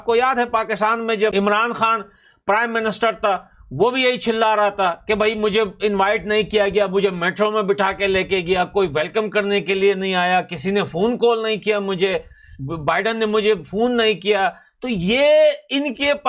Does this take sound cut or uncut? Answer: cut